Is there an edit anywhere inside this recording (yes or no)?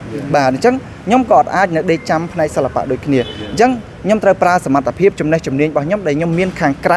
no